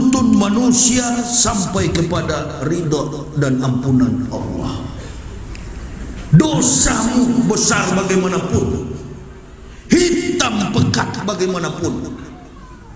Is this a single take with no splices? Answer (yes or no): yes